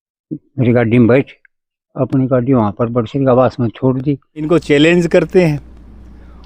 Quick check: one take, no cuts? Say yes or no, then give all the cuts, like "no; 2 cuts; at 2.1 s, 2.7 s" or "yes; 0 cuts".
no; 1 cut; at 4.3 s